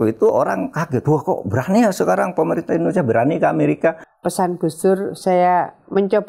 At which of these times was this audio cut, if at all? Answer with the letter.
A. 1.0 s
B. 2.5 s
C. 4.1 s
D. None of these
C